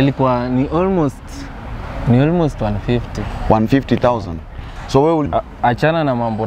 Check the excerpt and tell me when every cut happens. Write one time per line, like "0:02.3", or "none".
0:05.2